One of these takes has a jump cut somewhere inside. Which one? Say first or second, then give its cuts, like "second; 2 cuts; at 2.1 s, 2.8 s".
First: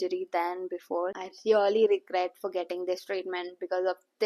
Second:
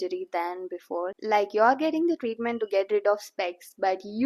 first; 1 cut; at 1.2 s